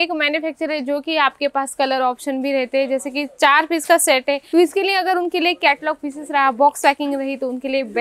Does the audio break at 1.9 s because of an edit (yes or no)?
no